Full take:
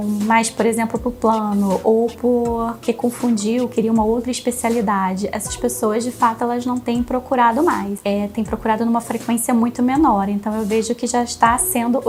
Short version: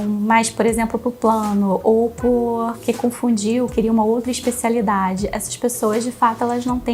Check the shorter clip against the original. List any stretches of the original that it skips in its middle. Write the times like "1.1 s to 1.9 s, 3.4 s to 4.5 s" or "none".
none